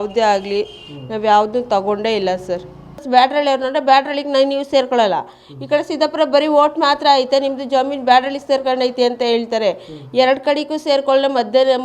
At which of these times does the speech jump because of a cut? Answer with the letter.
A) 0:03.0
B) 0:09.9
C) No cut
A